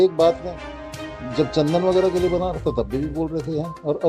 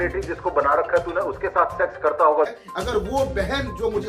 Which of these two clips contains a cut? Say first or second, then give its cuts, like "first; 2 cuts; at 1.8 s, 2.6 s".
second; 1 cut; at 2.6 s